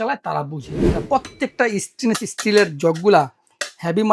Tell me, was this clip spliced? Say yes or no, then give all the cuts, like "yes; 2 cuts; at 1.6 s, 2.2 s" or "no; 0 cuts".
yes; 1 cut; at 1.0 s